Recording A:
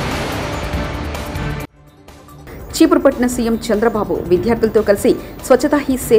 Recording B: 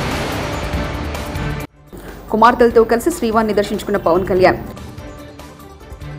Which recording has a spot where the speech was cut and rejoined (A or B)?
B